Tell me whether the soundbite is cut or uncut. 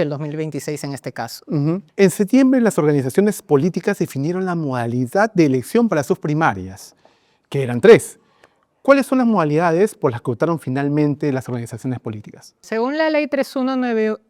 uncut